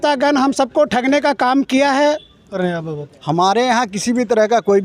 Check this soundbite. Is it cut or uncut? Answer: cut